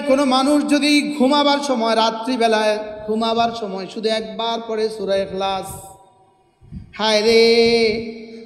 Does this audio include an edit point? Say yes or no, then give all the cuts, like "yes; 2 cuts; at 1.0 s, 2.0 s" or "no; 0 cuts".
no; 0 cuts